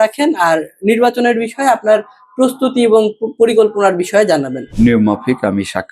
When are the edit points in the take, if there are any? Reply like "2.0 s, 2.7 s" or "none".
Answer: 4.6 s